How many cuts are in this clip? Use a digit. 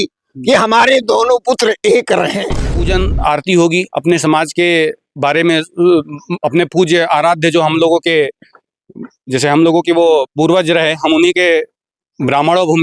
1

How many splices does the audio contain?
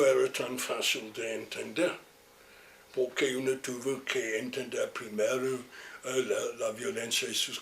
1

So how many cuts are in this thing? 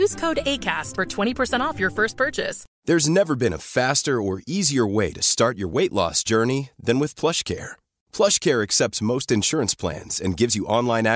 1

